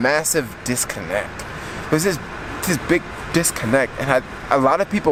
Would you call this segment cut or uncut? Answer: uncut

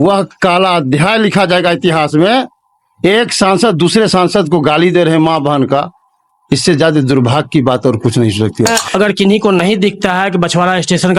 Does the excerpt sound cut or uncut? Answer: cut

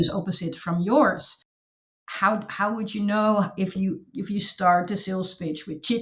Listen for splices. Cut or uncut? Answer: uncut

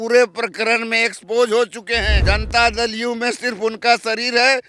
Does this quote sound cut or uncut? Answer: cut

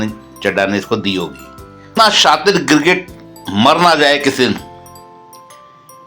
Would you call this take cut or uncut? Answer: cut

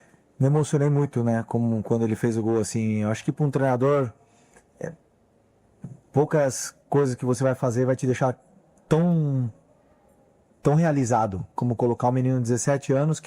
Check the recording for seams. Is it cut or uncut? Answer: cut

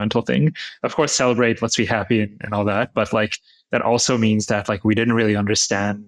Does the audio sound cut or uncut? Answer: uncut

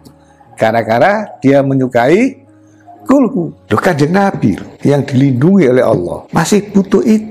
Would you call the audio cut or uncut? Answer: cut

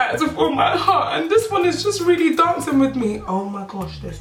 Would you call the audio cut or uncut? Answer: uncut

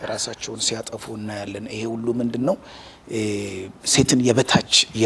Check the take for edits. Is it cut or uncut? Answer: uncut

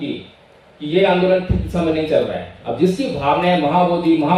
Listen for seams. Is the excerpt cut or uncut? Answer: uncut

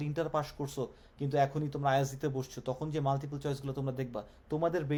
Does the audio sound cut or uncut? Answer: uncut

